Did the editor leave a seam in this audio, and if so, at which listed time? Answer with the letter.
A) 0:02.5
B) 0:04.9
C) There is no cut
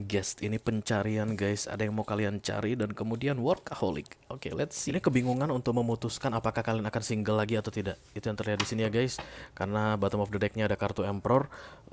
B